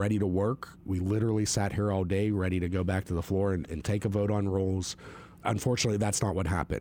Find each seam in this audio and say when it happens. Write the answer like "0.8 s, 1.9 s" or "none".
none